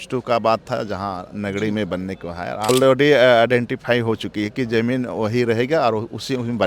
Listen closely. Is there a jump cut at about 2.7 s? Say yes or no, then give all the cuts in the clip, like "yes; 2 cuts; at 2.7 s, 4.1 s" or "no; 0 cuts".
yes; 1 cut; at 2.7 s